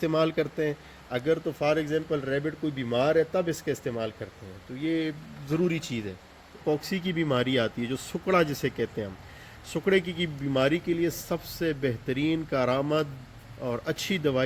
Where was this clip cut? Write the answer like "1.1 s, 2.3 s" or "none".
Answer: 6.6 s